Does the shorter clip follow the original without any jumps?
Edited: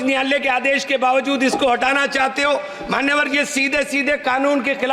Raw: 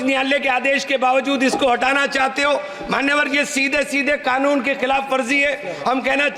yes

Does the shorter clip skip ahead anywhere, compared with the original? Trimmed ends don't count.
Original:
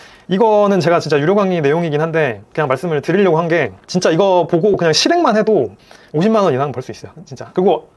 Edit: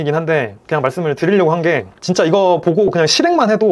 no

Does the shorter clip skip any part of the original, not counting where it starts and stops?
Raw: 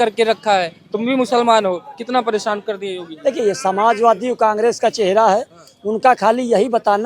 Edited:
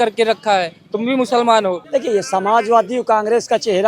yes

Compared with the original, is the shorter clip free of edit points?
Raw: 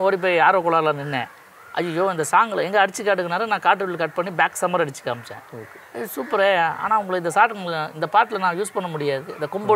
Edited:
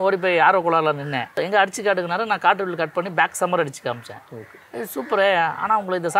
no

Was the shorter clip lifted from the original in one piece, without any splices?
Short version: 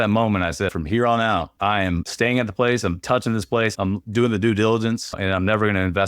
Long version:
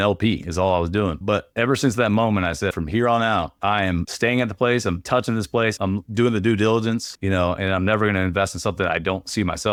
no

